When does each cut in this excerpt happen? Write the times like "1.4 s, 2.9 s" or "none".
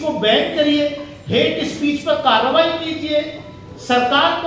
none